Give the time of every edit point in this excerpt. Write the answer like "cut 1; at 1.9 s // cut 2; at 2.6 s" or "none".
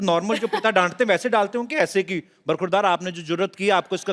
none